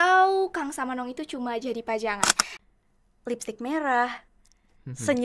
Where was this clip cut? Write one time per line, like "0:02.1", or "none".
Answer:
0:02.5